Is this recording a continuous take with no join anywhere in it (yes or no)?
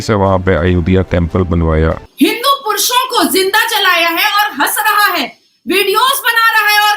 no